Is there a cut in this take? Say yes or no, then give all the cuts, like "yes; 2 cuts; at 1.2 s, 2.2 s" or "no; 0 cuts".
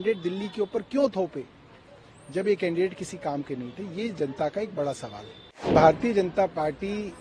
yes; 1 cut; at 5.7 s